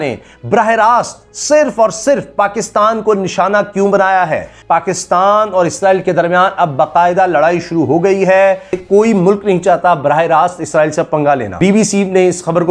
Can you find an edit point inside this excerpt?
yes; 3 cuts; at 4.5 s, 8.8 s, 11.5 s

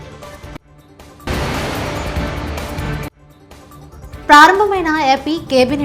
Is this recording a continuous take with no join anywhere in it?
no; 2 cuts; at 1.2 s, 3.1 s

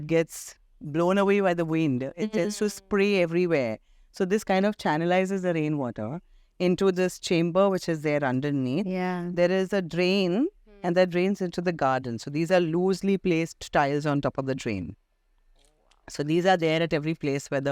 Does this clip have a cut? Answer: no; 0 cuts

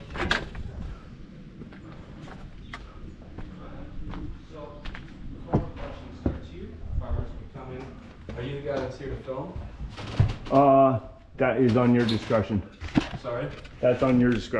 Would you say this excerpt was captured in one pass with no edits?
yes; 0 cuts

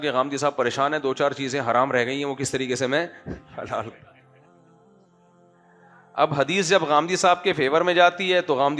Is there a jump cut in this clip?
yes; 2 cuts; at 4.2 s, 5.8 s

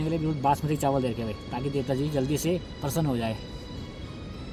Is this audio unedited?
yes; 0 cuts

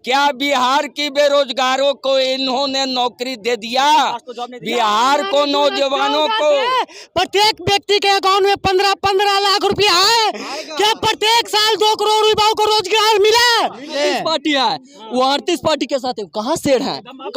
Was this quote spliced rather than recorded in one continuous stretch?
yes; 1 cut; at 13.9 s

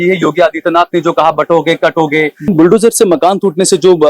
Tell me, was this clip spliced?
yes; 1 cut; at 2.5 s

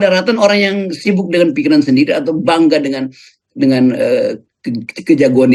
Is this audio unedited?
yes; 0 cuts

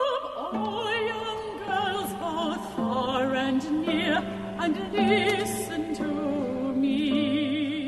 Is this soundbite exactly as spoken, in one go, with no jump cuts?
yes; 0 cuts

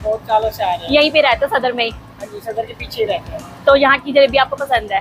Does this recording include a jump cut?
no; 0 cuts

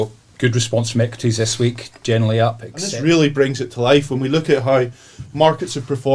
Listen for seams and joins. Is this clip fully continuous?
no; 1 cut; at 2.7 s

